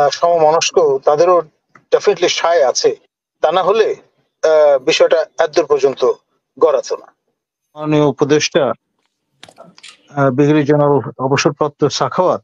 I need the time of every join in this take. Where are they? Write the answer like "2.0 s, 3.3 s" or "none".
7.9 s